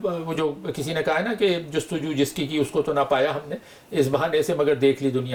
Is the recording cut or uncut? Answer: uncut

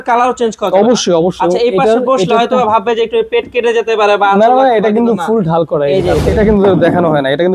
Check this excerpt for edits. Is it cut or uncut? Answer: cut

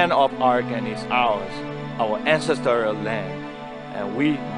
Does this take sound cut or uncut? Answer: uncut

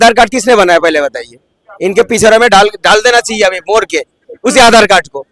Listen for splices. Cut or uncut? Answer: uncut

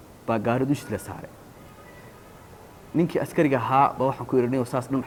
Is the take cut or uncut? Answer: uncut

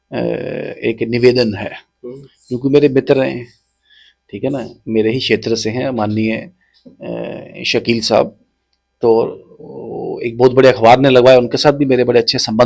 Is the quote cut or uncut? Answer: uncut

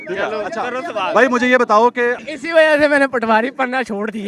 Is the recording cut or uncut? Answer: cut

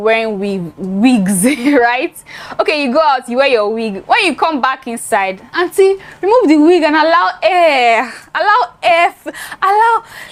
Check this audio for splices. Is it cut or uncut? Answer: uncut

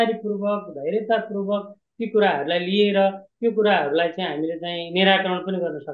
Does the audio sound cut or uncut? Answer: uncut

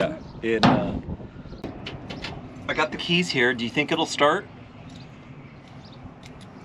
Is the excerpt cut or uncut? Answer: cut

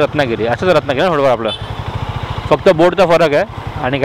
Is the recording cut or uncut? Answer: uncut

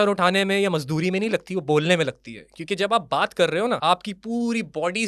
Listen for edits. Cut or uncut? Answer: cut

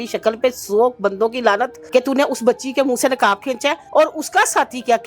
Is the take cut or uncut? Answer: cut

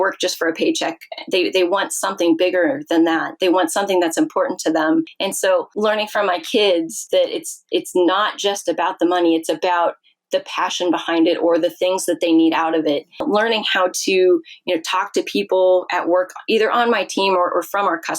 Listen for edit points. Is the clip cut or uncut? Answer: cut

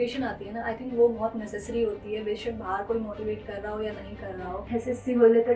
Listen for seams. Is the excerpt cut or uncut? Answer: cut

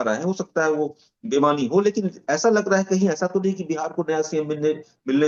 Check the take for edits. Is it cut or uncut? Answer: uncut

